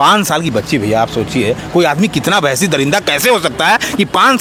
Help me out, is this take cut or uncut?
uncut